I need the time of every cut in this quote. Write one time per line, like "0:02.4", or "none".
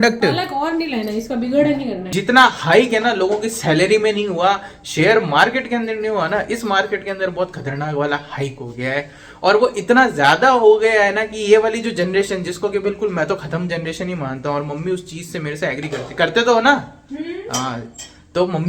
0:02.0